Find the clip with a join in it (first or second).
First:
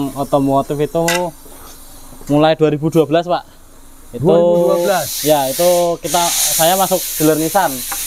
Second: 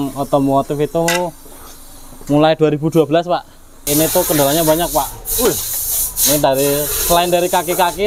second